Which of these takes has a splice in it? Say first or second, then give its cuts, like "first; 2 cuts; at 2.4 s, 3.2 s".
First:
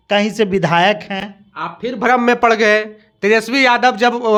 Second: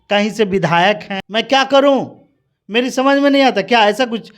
second; 1 cut; at 1.2 s